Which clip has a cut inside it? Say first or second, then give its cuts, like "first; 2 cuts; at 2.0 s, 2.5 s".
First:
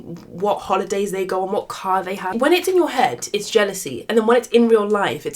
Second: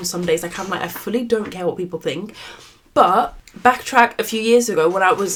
first; 1 cut; at 2.3 s